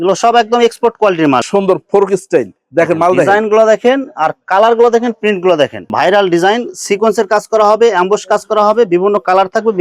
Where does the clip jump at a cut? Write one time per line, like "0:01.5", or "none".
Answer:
0:01.4
0:05.9